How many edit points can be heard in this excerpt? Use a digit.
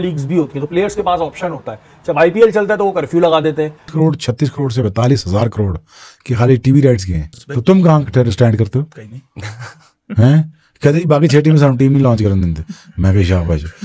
0